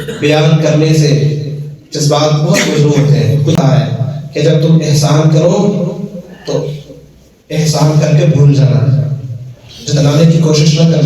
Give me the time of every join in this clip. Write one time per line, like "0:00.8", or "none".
0:03.6